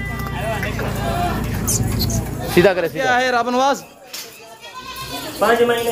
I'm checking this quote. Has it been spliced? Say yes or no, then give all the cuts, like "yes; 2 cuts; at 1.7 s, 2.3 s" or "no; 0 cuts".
yes; 1 cut; at 3.1 s